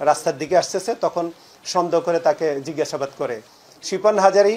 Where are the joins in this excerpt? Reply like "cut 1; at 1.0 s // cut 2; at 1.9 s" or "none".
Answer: cut 1; at 3.5 s